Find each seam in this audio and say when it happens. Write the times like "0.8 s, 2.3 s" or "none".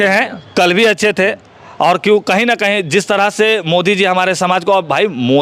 none